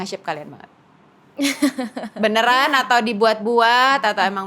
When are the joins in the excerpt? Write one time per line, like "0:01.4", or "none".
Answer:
none